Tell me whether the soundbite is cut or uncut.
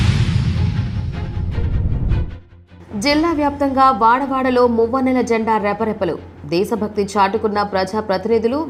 uncut